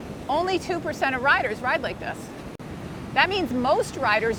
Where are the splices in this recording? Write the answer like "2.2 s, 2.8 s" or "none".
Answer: none